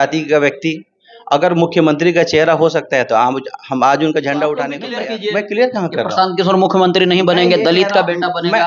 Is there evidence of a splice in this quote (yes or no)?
yes